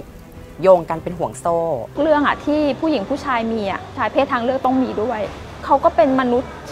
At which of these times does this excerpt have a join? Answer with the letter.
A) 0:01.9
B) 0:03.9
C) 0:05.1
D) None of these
A